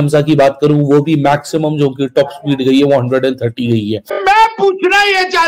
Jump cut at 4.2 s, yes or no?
yes